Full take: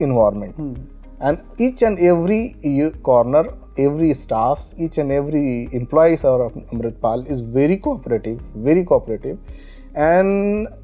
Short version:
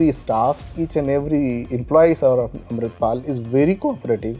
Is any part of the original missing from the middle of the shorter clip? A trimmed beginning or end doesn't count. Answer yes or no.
no